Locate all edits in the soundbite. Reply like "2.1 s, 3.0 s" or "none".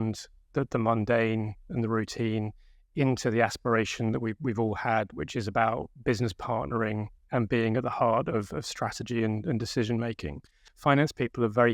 10.6 s